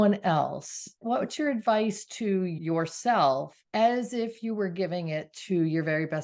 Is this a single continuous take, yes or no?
no